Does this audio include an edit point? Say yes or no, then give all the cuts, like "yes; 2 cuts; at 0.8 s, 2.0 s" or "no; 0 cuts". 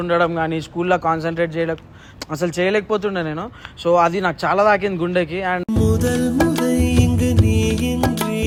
no; 0 cuts